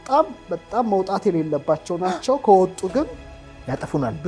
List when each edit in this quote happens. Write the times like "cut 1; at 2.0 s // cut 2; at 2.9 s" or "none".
none